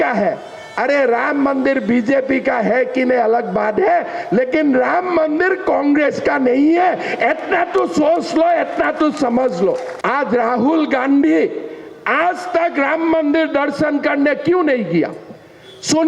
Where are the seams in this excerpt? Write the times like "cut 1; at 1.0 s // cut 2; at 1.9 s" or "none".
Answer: cut 1; at 9.9 s